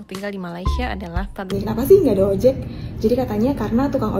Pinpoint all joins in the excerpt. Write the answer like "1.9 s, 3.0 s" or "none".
1.5 s

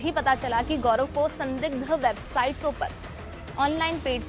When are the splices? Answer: none

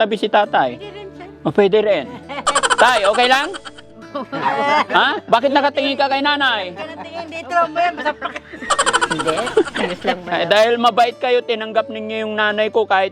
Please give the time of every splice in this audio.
10.3 s

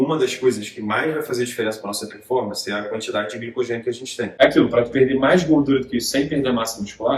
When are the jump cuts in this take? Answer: 4.3 s

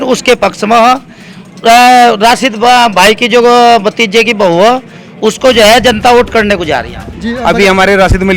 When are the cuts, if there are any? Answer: 7.0 s

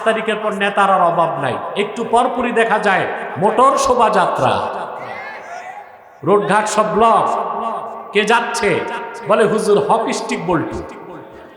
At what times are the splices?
none

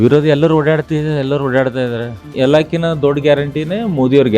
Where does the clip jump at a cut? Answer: 2.3 s

